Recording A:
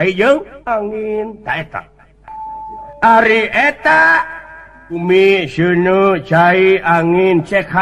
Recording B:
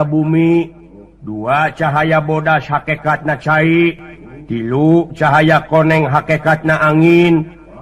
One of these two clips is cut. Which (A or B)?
A